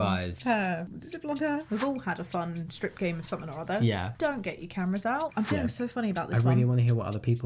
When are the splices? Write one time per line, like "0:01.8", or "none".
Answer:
0:01.6
0:05.3